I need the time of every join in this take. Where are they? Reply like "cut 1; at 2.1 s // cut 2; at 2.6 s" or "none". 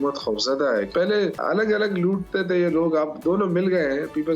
cut 1; at 1.2 s